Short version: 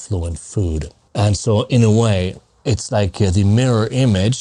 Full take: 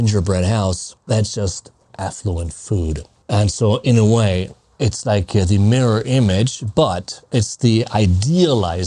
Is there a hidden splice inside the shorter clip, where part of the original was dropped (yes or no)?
no